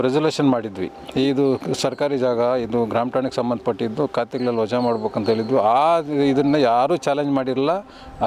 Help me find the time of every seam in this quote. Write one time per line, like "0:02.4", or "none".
none